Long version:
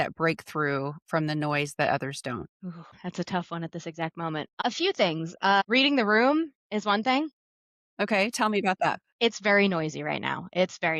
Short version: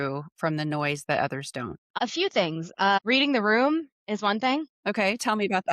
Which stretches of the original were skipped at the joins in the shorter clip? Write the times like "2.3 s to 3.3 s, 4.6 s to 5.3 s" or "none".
2.6 s to 4.5 s, 7.4 s to 7.9 s